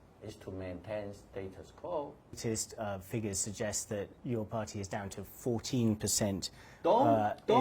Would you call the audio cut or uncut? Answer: cut